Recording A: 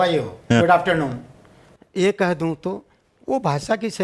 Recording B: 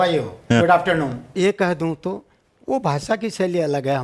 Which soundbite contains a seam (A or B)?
B